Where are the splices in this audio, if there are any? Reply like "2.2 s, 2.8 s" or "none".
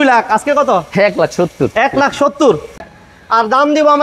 2.9 s